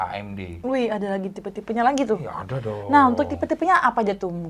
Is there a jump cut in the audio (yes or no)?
no